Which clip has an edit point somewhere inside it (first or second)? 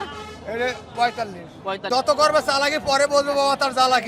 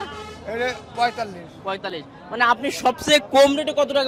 first